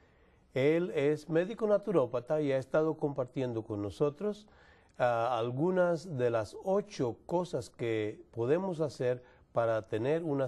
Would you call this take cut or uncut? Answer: cut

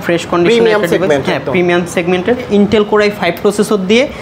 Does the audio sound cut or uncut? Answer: cut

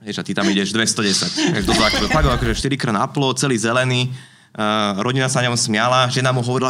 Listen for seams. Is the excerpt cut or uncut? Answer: cut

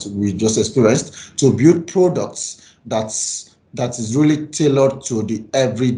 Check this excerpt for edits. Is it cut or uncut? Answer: uncut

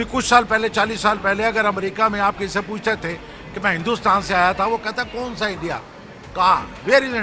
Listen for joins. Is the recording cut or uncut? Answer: uncut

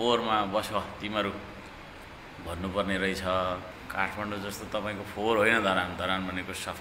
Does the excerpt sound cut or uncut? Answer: cut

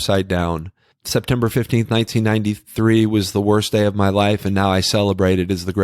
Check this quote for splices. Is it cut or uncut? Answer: cut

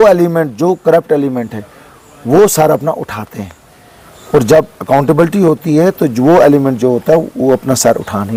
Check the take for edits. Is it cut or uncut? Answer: uncut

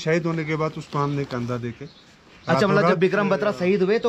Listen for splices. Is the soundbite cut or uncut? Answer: uncut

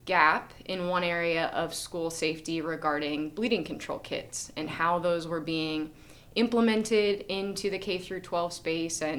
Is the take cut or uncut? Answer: uncut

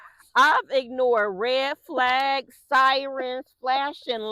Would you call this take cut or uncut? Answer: uncut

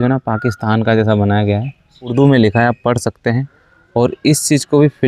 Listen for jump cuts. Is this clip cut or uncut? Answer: cut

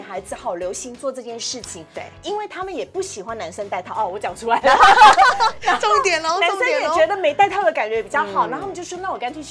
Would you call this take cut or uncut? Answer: uncut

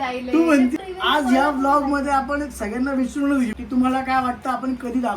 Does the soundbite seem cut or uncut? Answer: cut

